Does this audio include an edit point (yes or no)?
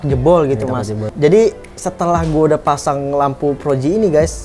yes